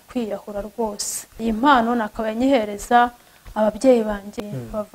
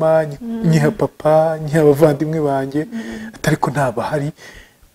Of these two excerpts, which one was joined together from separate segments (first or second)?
first